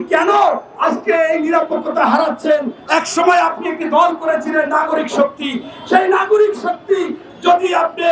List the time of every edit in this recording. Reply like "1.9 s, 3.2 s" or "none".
2.8 s